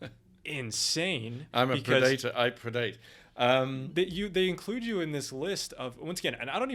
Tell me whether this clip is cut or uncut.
uncut